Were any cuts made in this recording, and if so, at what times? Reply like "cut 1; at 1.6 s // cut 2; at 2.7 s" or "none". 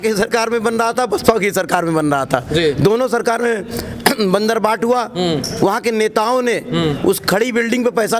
none